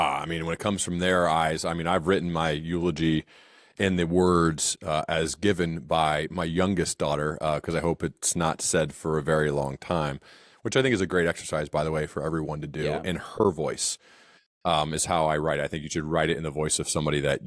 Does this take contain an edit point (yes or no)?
no